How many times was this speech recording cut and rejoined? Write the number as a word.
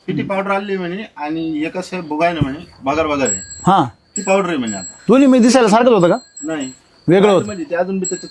zero